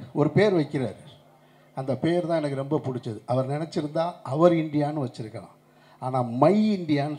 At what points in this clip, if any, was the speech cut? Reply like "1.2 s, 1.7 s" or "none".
none